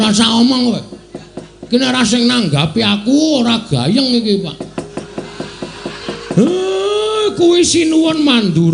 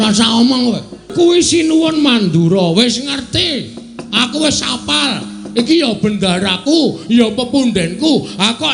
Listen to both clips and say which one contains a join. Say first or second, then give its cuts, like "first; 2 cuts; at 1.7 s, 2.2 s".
second; 1 cut; at 1.1 s